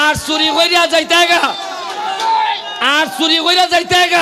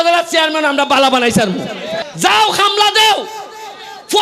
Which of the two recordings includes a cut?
second; 1 cut; at 1.9 s

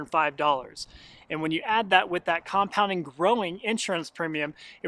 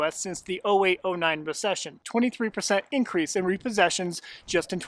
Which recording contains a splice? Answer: second; 1 cut; at 2.0 s

